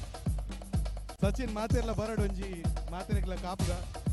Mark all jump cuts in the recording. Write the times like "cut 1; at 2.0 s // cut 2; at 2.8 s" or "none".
none